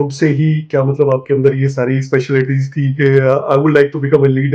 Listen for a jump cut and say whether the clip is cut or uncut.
uncut